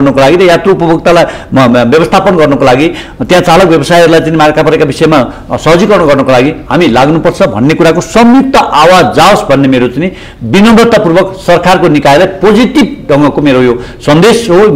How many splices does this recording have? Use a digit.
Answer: 0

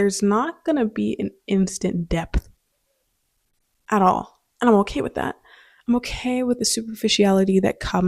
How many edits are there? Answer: 0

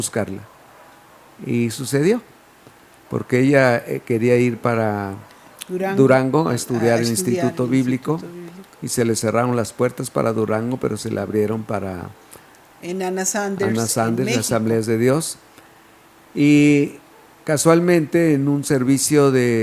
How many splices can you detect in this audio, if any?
0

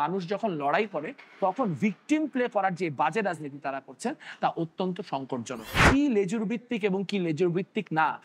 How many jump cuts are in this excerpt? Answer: 1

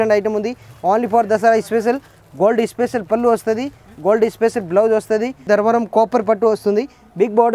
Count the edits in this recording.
1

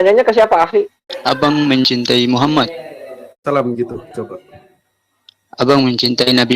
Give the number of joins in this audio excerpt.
2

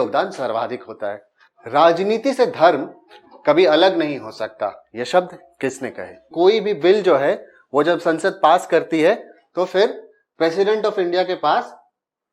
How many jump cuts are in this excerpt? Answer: 2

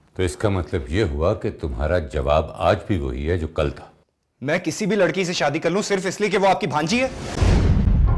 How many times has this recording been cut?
1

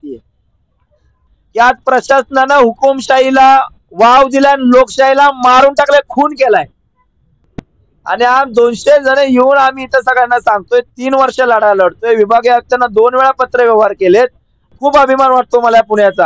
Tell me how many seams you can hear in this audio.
3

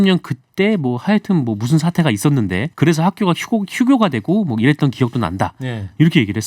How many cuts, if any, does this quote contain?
1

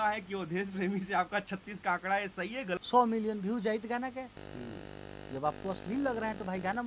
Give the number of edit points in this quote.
1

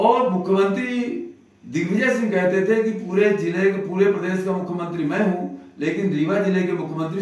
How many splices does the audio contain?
0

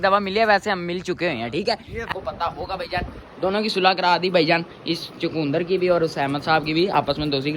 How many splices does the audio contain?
2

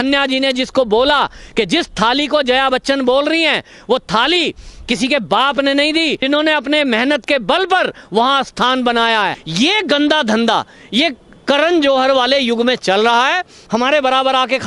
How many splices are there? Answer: 3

